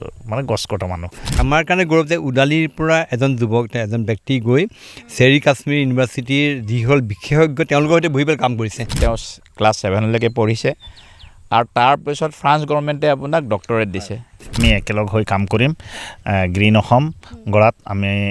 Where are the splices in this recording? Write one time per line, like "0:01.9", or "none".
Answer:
0:01.3
0:08.9
0:14.6